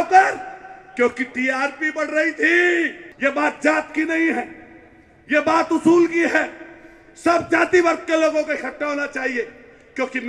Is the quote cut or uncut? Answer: cut